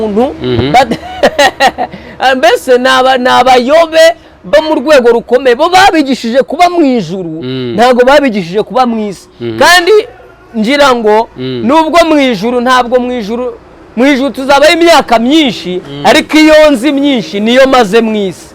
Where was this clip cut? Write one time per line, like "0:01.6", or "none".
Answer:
none

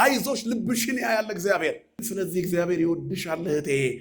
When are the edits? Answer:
0:02.0

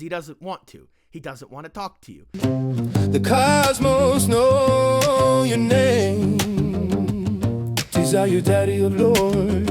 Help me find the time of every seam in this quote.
0:02.1

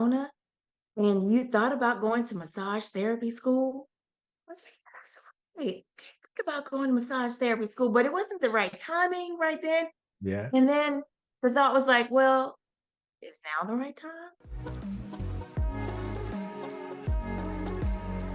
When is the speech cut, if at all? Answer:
0:14.4

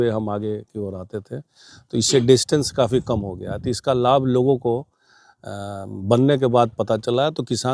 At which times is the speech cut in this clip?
none

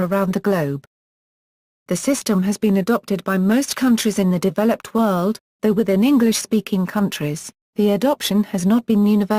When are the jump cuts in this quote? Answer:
0:05.7

